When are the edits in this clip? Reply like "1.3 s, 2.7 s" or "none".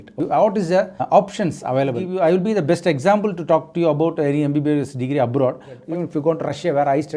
2.0 s, 5.7 s